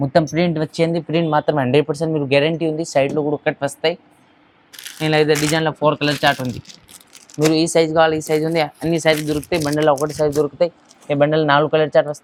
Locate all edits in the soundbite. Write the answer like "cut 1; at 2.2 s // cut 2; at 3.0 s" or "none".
none